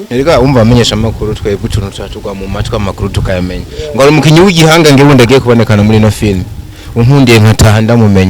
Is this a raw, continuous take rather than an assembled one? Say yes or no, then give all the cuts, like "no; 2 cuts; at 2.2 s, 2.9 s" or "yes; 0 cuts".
yes; 0 cuts